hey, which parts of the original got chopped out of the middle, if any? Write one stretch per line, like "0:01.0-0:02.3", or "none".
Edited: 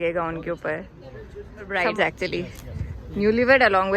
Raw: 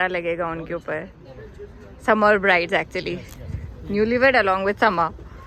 0:02.0-0:02.5

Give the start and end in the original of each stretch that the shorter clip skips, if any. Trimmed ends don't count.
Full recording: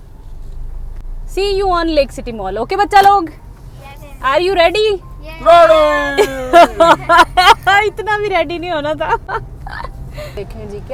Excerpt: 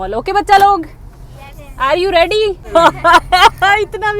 0:05.1-0:06.7

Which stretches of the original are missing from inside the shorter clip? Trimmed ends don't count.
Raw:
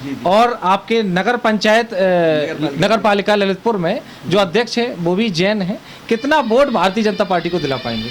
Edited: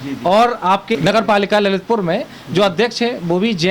0:00.9-0:02.7

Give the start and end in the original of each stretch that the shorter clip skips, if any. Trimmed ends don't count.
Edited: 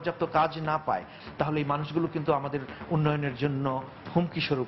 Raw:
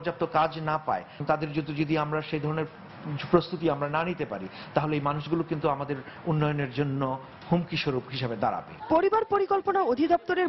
0:01.1-0:04.5

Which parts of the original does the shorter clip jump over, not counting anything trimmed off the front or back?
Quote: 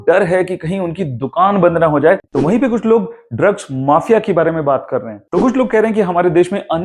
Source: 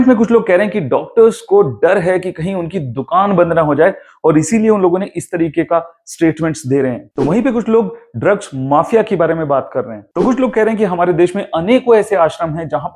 0:04.0-0:07.1

